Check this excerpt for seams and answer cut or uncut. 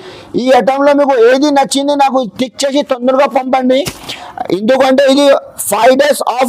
uncut